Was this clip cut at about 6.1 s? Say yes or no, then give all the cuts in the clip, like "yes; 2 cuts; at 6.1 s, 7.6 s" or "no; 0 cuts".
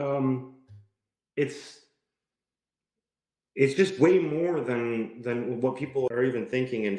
yes; 1 cut; at 6.1 s